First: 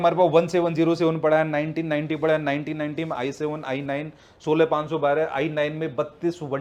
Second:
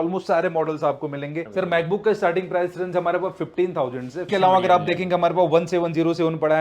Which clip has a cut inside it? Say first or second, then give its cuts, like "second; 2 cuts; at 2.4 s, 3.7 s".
second; 2 cuts; at 1.5 s, 4.2 s